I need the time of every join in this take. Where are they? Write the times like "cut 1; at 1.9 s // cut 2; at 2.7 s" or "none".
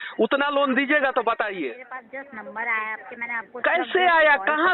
cut 1; at 2.0 s